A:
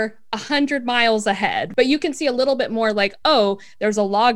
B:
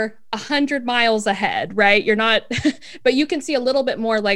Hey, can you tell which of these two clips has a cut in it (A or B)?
A